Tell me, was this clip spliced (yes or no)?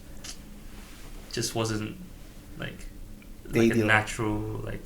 yes